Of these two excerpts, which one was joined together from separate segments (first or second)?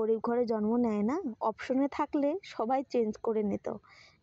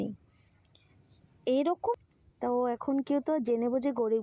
second